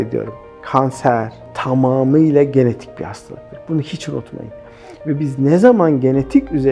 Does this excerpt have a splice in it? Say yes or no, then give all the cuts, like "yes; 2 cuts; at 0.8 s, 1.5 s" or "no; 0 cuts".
yes; 1 cut; at 1.5 s